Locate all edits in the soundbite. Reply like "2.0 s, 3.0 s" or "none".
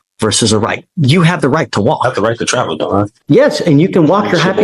3.1 s